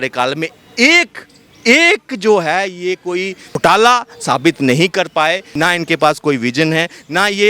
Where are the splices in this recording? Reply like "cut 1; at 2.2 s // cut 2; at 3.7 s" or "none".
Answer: cut 1; at 3.5 s // cut 2; at 5.5 s